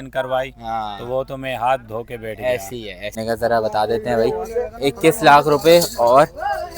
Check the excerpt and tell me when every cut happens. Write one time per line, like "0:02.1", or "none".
0:03.2